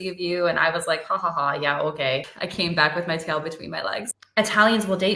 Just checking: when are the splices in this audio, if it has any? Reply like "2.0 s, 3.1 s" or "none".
2.4 s, 4.2 s

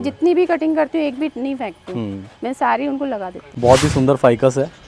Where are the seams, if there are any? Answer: 3.4 s

